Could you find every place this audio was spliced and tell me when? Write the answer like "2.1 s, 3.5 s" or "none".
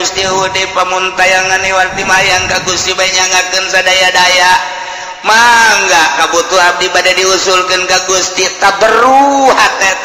2.0 s